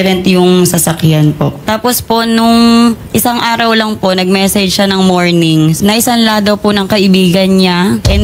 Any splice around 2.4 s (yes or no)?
no